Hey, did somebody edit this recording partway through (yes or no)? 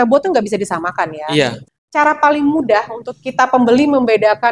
yes